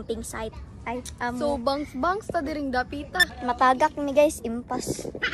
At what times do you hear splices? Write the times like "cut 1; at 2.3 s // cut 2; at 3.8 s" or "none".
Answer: cut 1; at 3.3 s